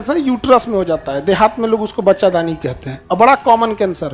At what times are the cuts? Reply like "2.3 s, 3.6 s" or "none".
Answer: none

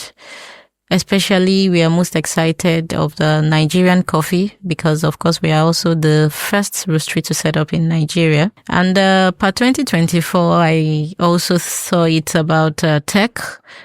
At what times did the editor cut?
8.6 s

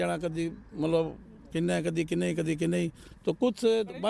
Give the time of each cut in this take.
none

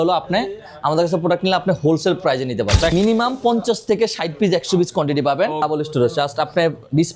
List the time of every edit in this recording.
2.9 s, 5.6 s

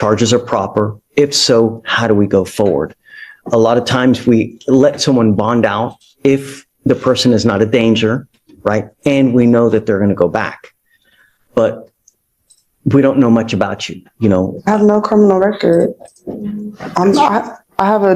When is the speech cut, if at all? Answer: none

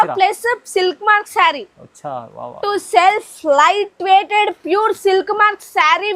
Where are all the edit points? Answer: 2.6 s

